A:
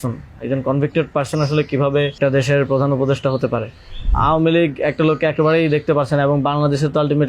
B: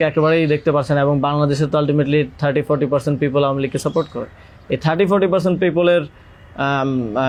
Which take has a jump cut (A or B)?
A